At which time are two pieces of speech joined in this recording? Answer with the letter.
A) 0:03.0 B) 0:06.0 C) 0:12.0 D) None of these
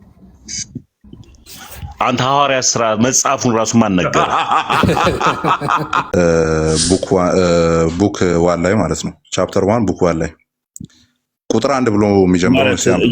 B